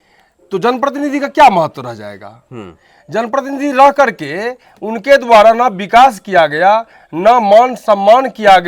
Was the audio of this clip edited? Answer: no; 0 cuts

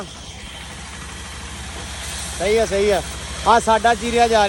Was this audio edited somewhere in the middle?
no; 0 cuts

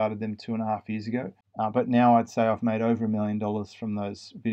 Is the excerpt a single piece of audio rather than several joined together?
no; 1 cut; at 1.4 s

